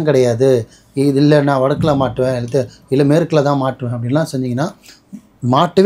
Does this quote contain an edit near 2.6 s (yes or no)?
no